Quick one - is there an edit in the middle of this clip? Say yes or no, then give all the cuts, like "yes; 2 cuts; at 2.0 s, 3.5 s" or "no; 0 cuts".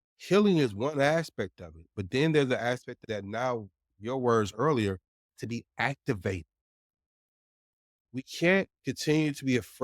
yes; 2 cuts; at 3.0 s, 3.8 s